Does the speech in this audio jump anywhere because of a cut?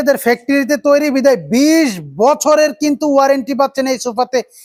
no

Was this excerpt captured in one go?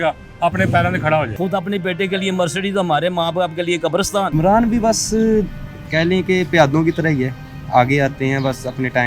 no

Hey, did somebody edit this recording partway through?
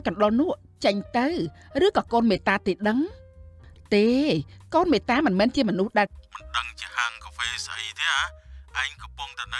yes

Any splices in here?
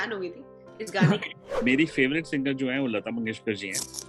yes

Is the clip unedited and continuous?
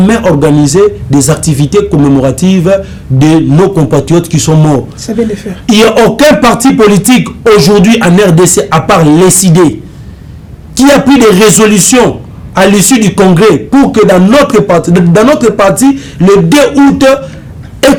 yes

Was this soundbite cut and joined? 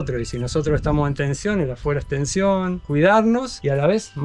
no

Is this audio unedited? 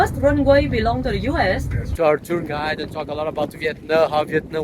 no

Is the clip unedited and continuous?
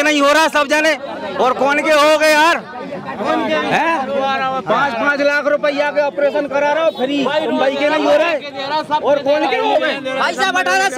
yes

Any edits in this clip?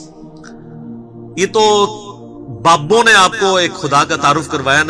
yes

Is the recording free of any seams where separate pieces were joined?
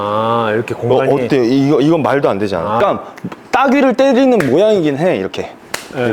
no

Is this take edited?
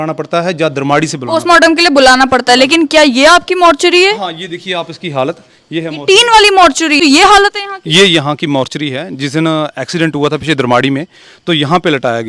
yes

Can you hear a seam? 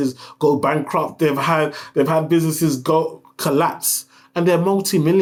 no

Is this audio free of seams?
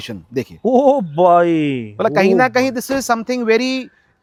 yes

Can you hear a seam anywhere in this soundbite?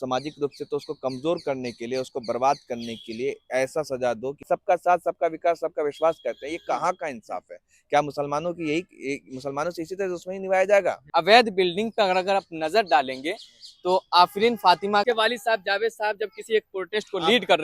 yes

